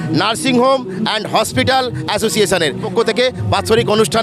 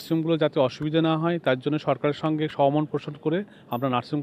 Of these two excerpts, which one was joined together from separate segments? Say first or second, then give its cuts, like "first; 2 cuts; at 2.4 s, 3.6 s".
first; 1 cut; at 2.9 s